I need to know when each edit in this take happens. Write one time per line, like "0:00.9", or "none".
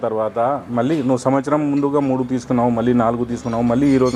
none